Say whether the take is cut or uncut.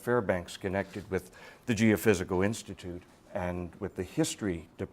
cut